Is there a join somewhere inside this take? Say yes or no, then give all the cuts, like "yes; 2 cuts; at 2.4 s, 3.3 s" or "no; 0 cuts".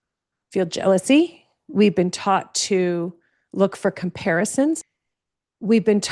yes; 1 cut; at 4.8 s